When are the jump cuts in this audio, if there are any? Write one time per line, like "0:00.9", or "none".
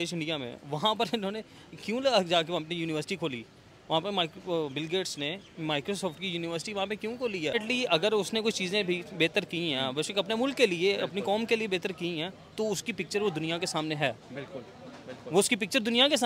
0:07.5